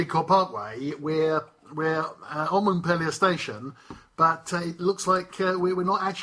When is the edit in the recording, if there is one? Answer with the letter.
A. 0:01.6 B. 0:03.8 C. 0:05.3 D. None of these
D